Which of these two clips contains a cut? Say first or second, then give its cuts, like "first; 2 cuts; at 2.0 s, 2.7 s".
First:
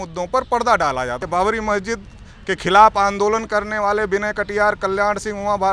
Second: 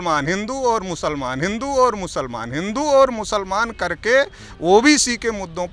first; 1 cut; at 1.2 s